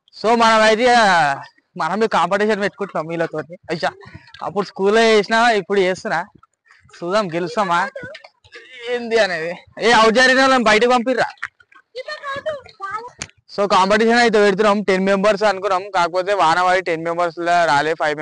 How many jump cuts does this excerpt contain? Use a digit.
1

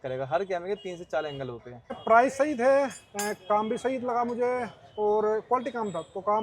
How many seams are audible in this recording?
1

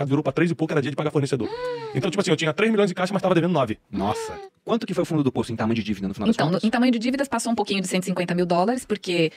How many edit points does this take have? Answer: 1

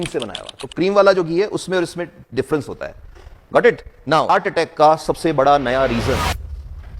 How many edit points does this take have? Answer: 1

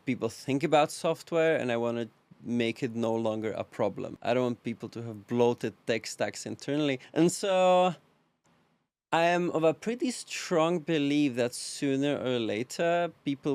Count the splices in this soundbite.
2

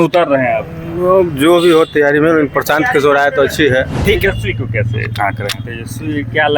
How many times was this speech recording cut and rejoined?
1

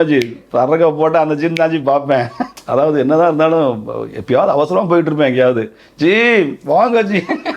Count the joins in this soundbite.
1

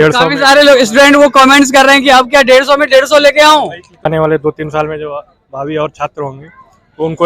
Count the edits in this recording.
1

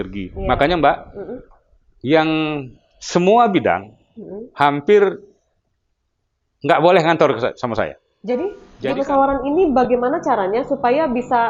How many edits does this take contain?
1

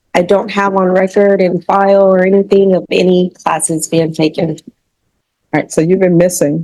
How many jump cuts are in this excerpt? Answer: 0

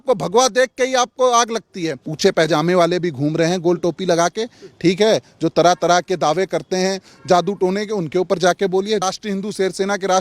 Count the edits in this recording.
2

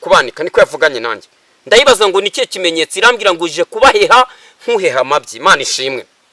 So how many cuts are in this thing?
0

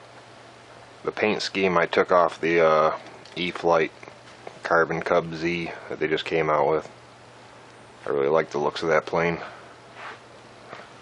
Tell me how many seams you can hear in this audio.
1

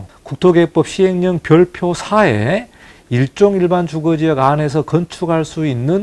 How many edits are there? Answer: 0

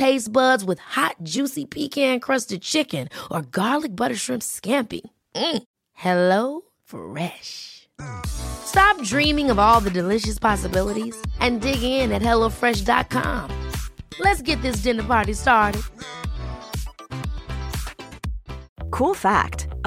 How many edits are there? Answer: 0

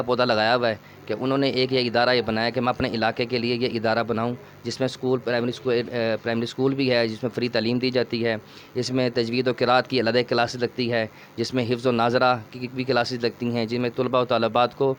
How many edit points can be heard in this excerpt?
0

